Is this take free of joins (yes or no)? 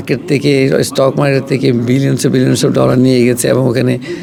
yes